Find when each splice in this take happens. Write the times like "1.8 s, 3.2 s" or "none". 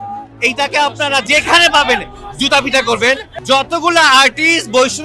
1.2 s, 3.3 s